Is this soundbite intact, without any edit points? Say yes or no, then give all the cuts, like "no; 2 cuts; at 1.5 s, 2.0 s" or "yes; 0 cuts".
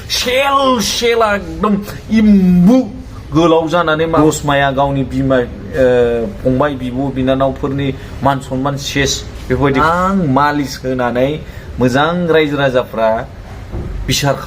no; 2 cuts; at 4.2 s, 9.8 s